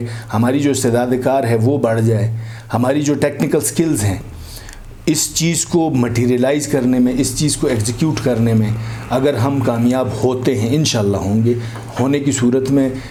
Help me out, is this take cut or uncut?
uncut